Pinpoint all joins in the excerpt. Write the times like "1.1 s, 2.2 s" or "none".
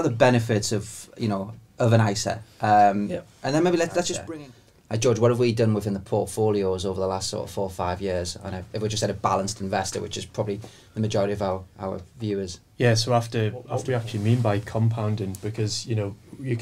4.2 s, 13.9 s